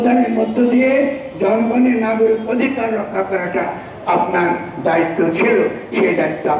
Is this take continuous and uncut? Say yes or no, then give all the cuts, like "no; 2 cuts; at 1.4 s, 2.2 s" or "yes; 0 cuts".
yes; 0 cuts